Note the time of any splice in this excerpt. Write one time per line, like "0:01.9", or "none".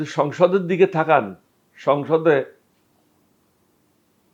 none